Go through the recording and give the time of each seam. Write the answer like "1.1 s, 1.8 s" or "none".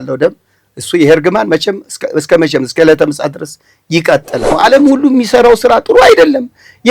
4.5 s